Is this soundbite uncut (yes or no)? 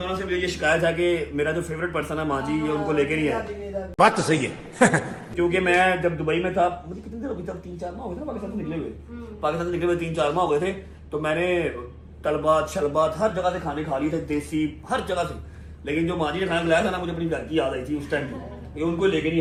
yes